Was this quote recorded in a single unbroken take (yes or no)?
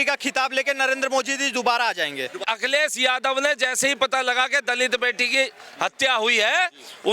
no